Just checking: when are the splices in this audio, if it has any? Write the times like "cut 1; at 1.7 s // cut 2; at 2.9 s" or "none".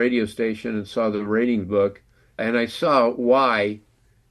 cut 1; at 2.4 s